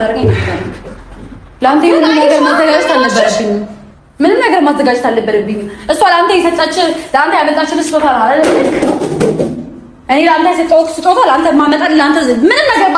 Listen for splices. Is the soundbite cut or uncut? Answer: uncut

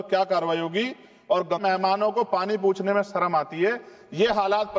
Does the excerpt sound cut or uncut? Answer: cut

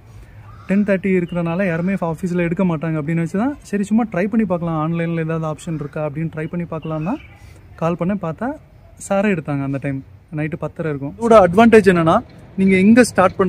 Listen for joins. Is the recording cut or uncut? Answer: cut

